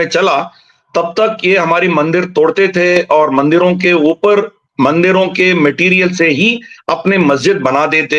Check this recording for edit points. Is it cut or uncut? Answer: uncut